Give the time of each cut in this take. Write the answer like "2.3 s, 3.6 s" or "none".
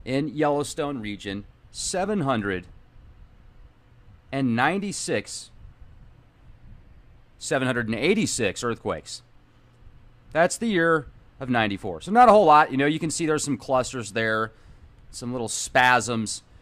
1.0 s